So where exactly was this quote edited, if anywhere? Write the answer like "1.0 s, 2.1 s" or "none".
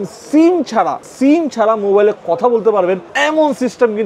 1.0 s, 3.1 s